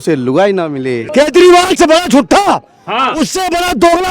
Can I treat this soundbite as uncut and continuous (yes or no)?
no